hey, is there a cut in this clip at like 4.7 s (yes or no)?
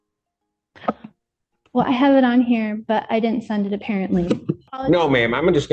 yes